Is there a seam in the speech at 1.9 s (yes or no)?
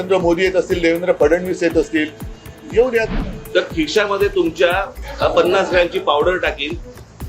no